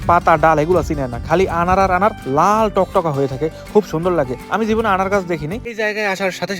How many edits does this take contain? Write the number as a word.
one